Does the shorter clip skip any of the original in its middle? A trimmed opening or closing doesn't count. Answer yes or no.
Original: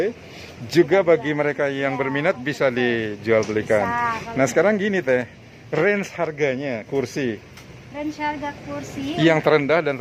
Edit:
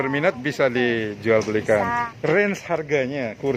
yes